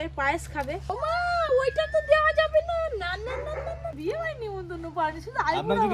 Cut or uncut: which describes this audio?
cut